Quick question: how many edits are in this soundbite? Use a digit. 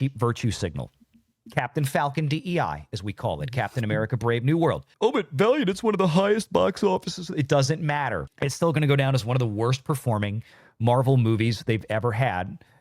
2